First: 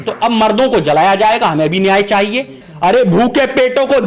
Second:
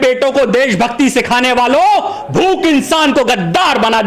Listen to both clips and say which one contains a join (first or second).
first